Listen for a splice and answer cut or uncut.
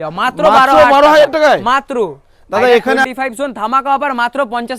cut